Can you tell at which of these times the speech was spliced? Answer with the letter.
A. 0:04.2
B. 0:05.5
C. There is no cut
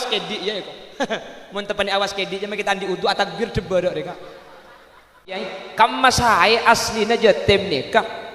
B